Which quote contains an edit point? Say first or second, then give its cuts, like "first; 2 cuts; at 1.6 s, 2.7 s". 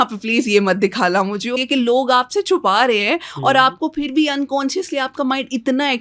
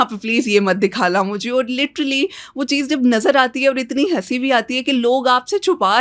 first; 1 cut; at 1.5 s